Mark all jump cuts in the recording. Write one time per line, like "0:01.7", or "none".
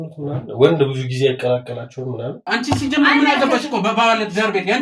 0:02.4